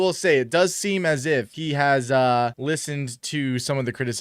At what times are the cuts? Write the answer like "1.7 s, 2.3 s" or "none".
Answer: 1.6 s, 2.6 s